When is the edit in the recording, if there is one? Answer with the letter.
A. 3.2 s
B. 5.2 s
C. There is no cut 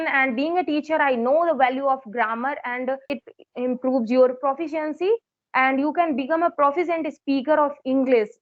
A